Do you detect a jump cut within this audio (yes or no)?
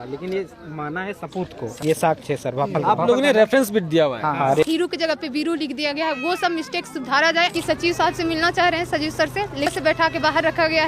yes